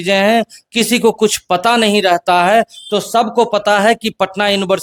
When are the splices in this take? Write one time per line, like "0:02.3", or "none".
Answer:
none